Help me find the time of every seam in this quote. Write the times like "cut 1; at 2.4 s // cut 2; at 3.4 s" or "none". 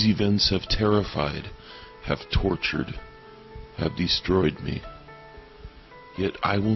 cut 1; at 1.9 s

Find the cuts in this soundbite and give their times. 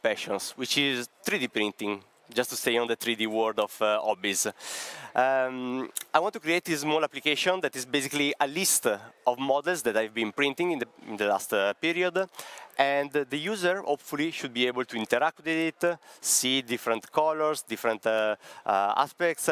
none

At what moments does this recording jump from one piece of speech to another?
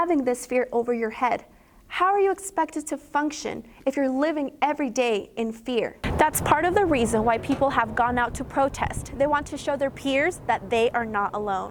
cut 1; at 6.0 s

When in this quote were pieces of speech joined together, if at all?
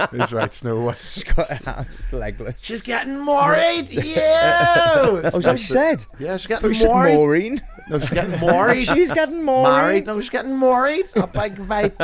none

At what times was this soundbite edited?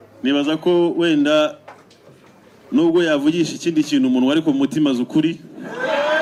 none

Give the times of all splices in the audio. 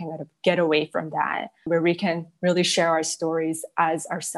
cut 1; at 1.6 s

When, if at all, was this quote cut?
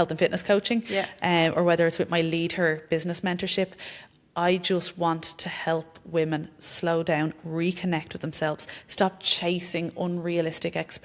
none

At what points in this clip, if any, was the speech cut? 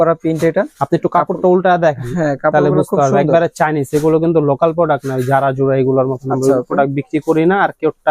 none

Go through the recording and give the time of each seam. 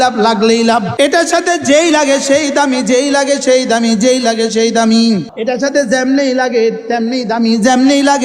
cut 1; at 0.9 s // cut 2; at 5.3 s

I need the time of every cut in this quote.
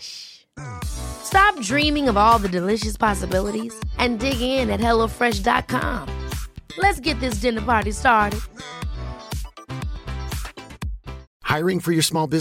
cut 1; at 11.2 s

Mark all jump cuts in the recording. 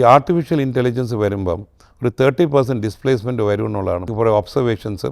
cut 1; at 4.1 s

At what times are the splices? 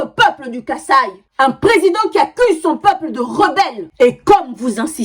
cut 1; at 1.2 s // cut 2; at 3.8 s

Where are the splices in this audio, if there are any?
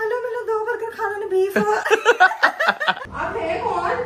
cut 1; at 3.0 s

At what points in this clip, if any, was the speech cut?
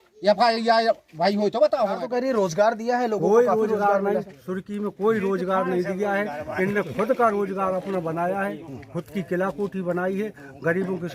cut 1; at 2.0 s

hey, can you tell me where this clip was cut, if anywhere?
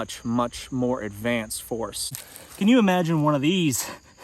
cut 1; at 2.0 s

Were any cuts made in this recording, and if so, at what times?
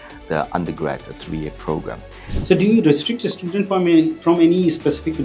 cut 1; at 2.3 s

